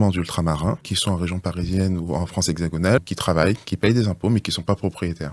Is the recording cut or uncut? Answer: cut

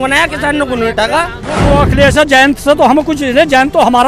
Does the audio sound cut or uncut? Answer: cut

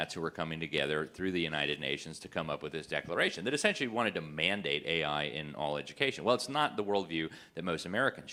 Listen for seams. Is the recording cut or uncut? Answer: uncut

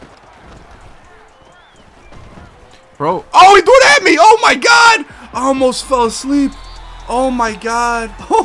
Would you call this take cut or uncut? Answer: uncut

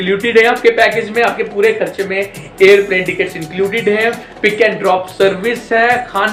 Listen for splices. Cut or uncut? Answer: uncut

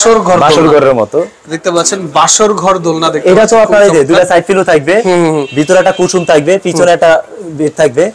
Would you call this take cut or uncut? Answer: uncut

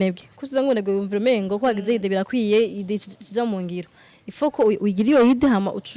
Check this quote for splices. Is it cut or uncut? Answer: uncut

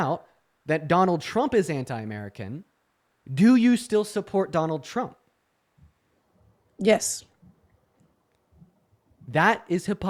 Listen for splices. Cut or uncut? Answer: uncut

